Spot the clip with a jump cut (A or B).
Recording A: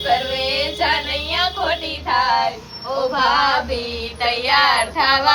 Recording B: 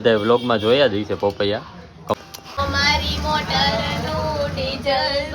B